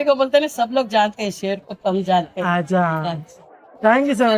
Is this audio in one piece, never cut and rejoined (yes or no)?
yes